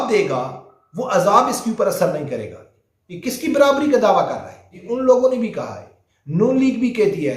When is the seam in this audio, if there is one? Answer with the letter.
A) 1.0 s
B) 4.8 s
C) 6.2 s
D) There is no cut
B